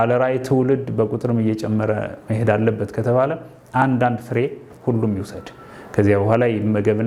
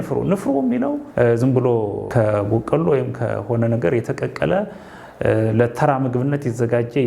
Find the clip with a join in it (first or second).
second